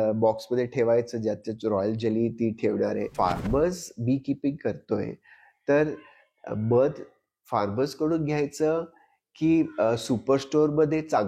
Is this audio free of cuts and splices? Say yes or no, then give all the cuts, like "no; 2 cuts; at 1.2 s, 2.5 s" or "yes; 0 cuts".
no; 1 cut; at 3.1 s